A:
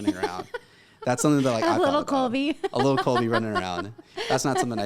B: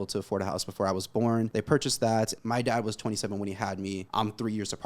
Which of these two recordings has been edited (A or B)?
B